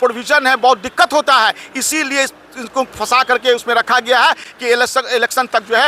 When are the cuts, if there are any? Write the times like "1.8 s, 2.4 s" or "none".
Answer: none